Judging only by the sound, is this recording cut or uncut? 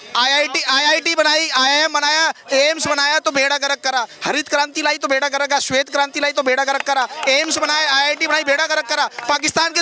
uncut